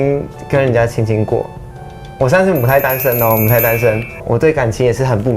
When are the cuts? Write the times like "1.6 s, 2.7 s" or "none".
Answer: 4.2 s